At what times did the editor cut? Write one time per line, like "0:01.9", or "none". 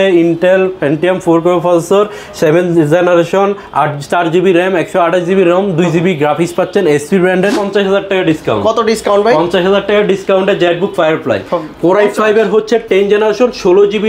0:07.5